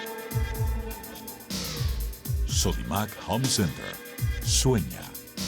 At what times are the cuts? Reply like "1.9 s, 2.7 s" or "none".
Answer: 1.2 s